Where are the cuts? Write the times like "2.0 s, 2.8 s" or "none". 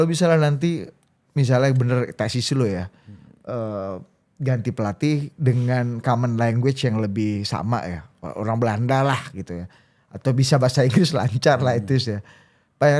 none